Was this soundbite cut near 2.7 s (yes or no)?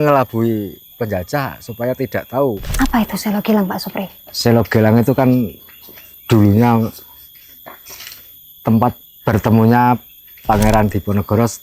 yes